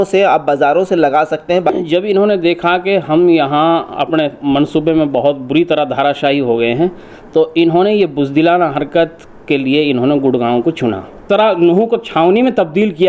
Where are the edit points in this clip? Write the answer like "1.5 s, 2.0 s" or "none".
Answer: 1.7 s, 11.2 s